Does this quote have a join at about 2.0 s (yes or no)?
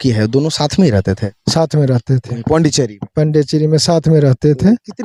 no